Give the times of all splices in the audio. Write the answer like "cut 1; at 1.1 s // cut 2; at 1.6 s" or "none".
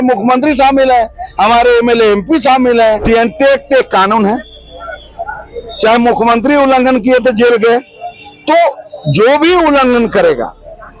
cut 1; at 3.0 s